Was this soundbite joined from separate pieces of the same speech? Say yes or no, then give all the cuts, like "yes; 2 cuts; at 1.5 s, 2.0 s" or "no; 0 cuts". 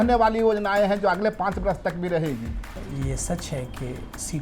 yes; 1 cut; at 2.6 s